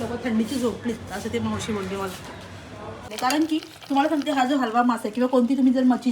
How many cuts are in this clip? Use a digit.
1